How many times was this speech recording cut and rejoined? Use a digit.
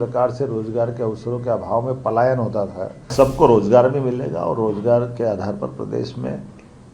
1